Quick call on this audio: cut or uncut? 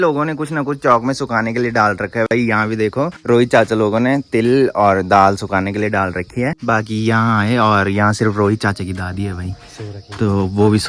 uncut